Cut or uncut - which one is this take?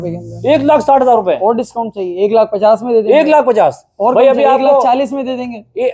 uncut